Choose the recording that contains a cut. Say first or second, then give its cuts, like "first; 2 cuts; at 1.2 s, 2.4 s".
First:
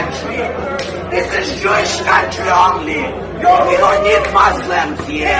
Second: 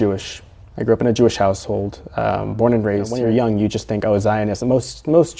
second; 1 cut; at 3.1 s